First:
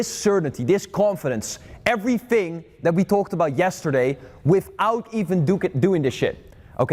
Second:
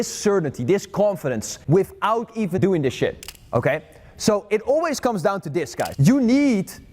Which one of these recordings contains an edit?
second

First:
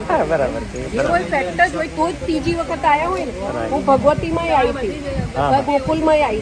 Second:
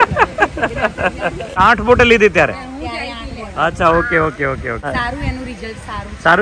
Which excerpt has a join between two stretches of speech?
second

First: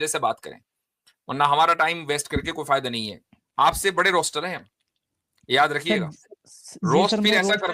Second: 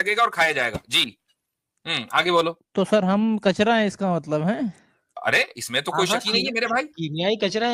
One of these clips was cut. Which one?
second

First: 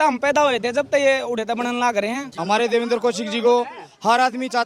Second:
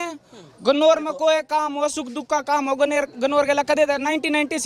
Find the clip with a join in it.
first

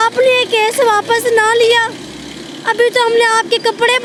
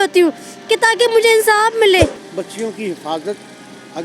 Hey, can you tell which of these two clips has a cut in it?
second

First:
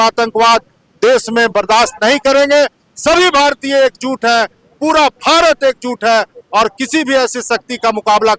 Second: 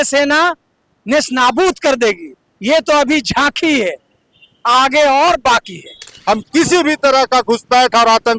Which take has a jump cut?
second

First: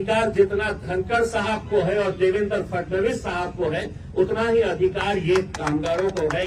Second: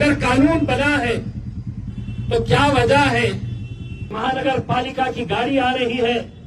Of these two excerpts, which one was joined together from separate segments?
second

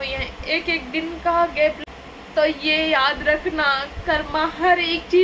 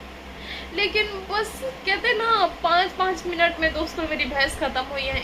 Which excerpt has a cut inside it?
first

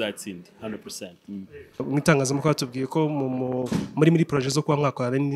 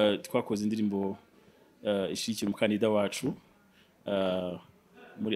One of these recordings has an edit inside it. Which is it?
first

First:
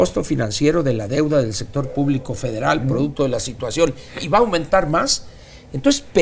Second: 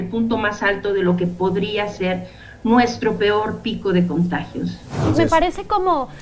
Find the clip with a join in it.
second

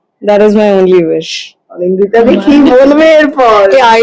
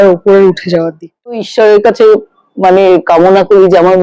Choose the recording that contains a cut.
second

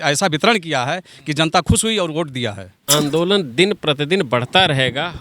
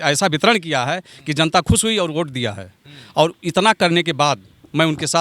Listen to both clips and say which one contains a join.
first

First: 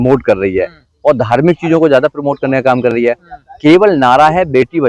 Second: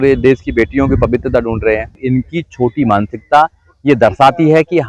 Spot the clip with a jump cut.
second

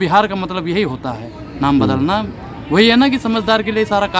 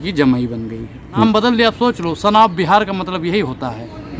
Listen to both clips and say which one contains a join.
second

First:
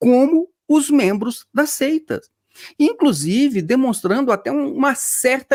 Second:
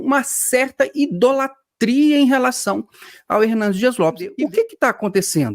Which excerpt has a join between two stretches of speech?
second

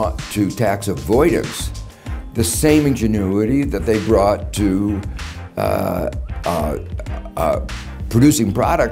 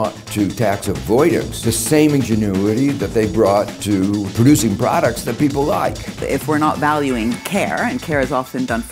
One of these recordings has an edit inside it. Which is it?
second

